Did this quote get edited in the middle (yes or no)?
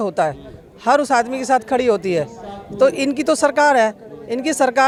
no